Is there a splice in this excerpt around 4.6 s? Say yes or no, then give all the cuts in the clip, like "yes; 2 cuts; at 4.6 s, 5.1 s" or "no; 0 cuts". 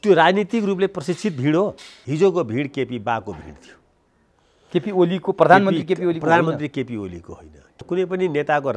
no; 2 cuts; at 1.9 s, 7.7 s